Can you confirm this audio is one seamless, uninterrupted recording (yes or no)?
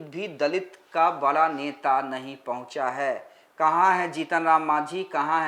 yes